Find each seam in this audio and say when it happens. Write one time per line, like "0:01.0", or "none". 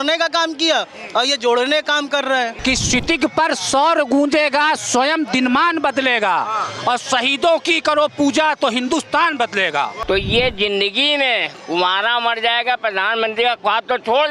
0:02.6
0:10.0